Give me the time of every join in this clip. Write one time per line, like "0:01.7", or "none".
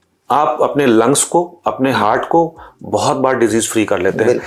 none